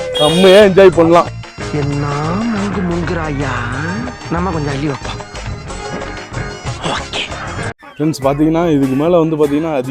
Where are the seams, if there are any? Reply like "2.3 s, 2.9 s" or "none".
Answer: 1.7 s, 7.8 s